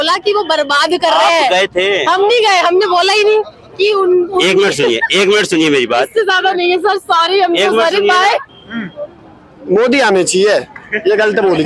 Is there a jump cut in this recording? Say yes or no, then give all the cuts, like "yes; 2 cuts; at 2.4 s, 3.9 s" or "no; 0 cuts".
yes; 1 cut; at 8.5 s